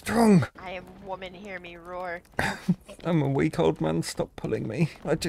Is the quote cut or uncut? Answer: uncut